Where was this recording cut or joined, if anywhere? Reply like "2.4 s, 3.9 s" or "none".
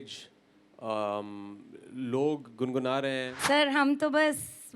3.3 s